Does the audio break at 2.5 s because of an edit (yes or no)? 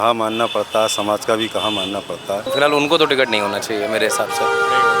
yes